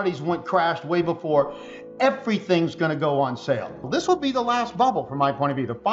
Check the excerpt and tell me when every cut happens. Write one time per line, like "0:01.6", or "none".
0:04.0